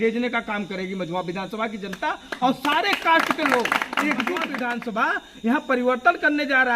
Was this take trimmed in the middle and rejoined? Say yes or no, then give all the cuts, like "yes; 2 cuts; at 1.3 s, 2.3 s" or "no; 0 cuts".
yes; 1 cut; at 4.6 s